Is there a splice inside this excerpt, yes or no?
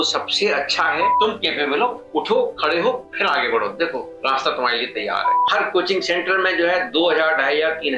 yes